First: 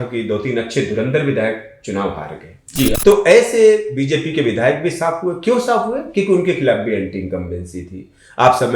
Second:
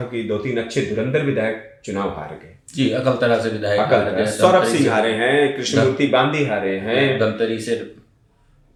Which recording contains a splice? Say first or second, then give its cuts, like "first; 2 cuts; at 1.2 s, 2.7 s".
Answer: first; 1 cut; at 3.0 s